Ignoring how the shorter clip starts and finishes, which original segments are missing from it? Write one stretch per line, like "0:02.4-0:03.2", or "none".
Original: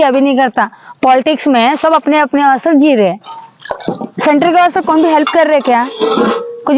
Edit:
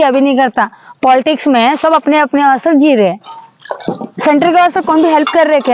none